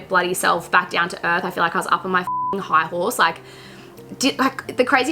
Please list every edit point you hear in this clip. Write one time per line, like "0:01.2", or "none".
none